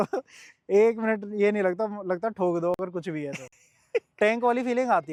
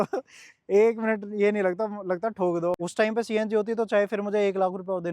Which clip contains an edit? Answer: second; 1 cut; at 2.8 s

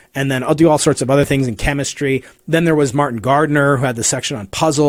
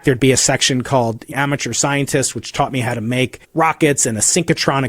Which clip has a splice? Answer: second; 2 cuts; at 1.3 s, 3.4 s

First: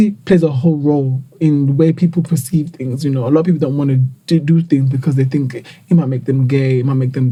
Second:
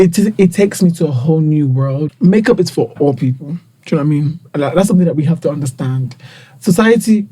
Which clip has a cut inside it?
second; 1 cut; at 2.0 s

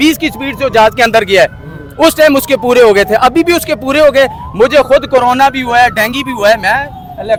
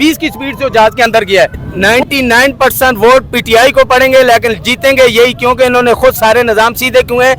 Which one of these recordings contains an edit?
second; 1 cut; at 1.7 s

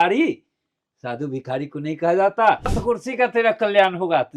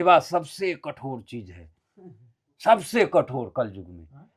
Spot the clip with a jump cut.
first; 1 cut; at 2.8 s

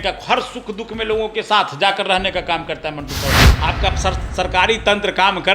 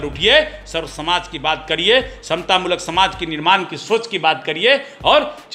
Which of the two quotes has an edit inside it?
first; 1 cut; at 3.5 s

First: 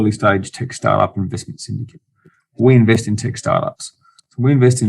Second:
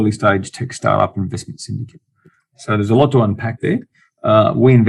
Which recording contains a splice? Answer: first; 1 cut; at 2.6 s

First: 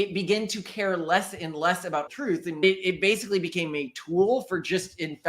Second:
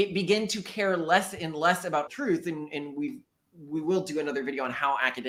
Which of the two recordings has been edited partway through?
first; 1 cut; at 2.6 s

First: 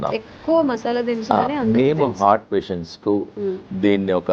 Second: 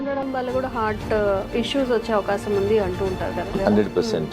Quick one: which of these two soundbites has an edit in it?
second; 2 cuts; at 1.4 s, 3.5 s

